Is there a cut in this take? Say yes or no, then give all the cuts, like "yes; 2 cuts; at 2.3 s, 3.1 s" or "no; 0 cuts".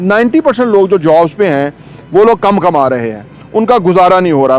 no; 0 cuts